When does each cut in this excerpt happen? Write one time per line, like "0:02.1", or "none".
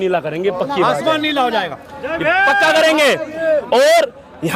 none